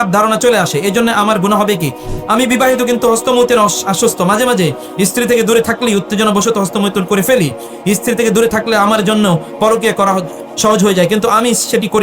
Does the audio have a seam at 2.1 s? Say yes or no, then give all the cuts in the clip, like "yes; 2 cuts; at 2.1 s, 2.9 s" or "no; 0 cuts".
yes; 1 cut; at 2.1 s